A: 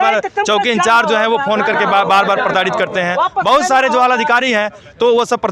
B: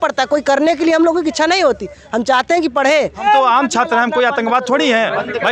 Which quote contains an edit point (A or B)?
B